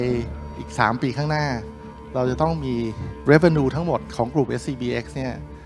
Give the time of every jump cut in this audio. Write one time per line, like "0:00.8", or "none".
0:03.1
0:04.1

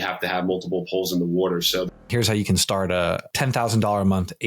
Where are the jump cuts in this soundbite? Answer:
0:02.0
0:03.2

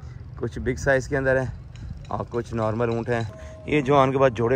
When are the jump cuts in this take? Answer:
0:03.4

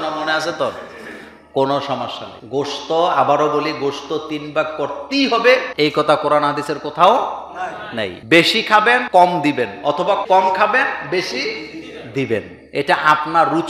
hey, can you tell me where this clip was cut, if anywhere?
none

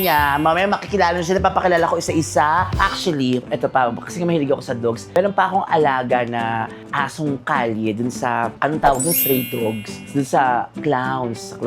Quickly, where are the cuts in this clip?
0:02.7

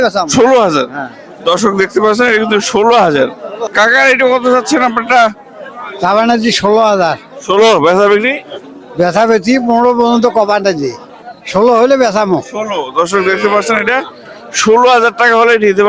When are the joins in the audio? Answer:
0:03.6
0:11.1

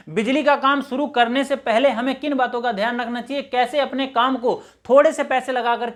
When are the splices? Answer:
none

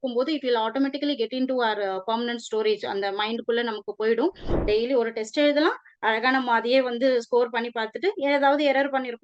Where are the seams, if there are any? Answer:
0:04.5

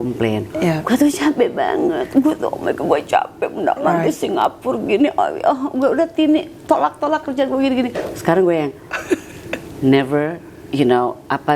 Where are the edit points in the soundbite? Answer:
none

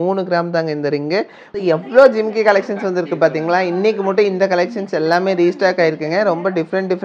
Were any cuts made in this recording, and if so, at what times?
0:01.4

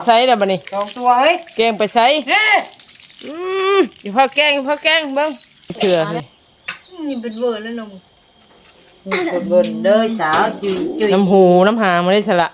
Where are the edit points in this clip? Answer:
0:05.7

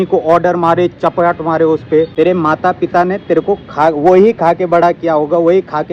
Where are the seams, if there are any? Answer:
0:02.1

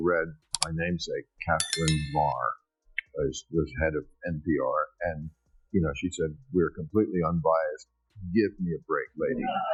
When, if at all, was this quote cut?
none

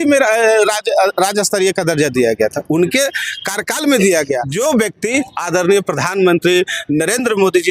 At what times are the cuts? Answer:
0:04.5

